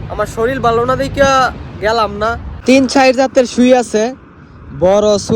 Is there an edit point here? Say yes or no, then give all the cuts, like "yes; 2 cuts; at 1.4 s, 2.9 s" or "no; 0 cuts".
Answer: yes; 1 cut; at 2.5 s